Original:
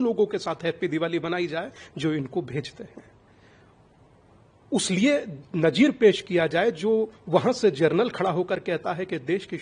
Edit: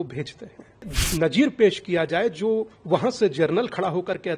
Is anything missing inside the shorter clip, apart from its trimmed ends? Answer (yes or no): yes